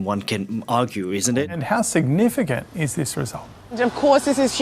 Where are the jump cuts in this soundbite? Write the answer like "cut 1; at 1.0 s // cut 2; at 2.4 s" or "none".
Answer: cut 1; at 1.5 s